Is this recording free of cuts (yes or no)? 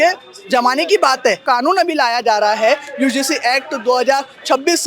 no